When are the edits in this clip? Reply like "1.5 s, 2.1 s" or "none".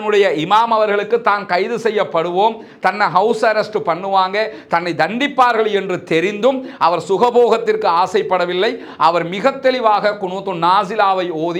none